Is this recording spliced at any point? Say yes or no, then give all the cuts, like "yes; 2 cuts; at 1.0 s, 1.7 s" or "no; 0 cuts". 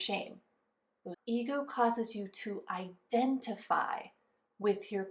yes; 1 cut; at 1.2 s